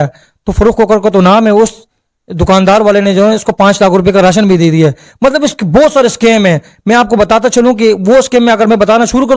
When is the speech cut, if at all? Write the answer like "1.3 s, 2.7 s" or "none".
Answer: none